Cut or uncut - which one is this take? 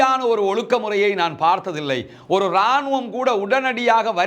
uncut